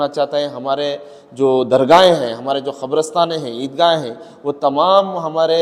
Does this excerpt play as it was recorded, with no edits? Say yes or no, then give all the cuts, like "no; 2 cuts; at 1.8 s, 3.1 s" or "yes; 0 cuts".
yes; 0 cuts